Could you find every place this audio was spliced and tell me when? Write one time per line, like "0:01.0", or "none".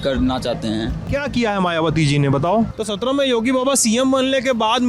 0:01.0
0:02.7